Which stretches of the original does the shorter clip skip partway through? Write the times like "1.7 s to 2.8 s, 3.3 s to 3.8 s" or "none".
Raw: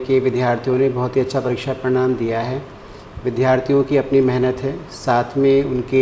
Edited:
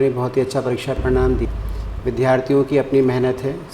2.3 s to 2.7 s